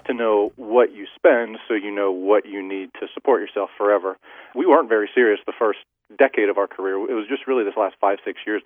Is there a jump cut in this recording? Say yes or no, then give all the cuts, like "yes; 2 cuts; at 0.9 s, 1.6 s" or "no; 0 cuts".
yes; 1 cut; at 4.5 s